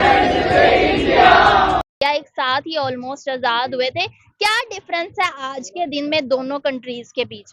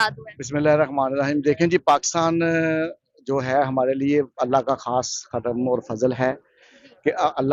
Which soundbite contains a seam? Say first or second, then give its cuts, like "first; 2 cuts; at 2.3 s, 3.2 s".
first; 1 cut; at 1.8 s